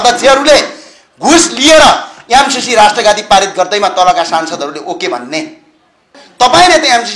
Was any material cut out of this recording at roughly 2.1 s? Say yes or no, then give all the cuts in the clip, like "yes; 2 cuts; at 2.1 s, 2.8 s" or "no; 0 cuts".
no; 1 cut; at 6.2 s